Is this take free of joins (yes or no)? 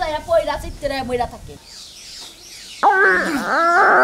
no